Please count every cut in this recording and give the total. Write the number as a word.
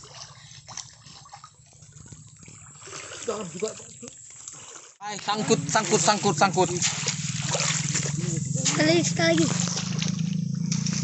one